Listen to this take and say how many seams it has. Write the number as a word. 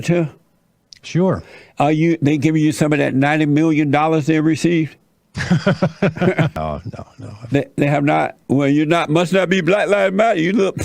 one